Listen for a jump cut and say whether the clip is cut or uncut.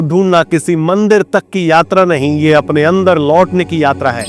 uncut